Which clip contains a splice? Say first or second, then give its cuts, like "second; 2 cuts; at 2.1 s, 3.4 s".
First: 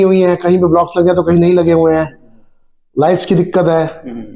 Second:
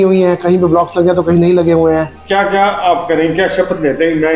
second; 1 cut; at 2.2 s